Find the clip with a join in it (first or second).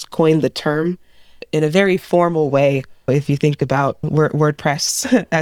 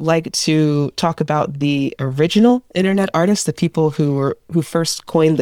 first